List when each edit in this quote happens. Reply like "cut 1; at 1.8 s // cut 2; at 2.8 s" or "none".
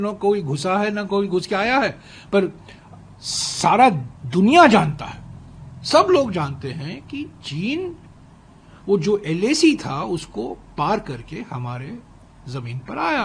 none